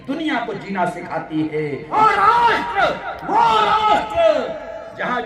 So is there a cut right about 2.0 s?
yes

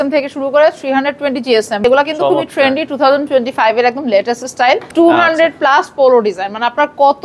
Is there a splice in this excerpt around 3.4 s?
no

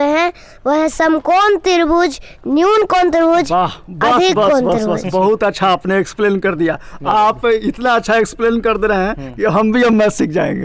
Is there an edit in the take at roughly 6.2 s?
no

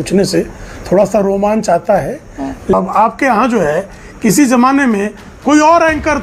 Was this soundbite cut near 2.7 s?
yes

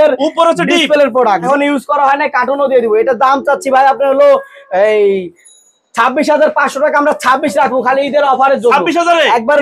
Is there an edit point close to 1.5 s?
yes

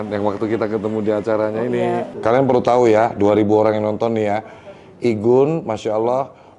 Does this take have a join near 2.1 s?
yes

